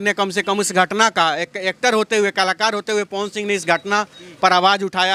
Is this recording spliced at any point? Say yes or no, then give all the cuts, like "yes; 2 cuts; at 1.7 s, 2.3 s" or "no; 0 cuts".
no; 0 cuts